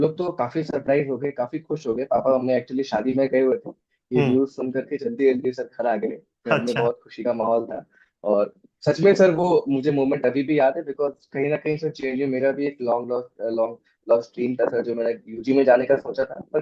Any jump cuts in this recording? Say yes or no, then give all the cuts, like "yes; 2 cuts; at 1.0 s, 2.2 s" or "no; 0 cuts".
no; 0 cuts